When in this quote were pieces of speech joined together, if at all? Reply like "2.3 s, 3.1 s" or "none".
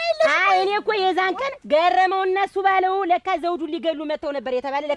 none